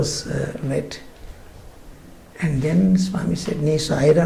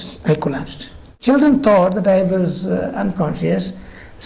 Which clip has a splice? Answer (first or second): second